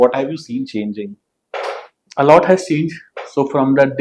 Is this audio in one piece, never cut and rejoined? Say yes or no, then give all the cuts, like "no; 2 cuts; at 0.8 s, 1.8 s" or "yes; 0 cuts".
yes; 0 cuts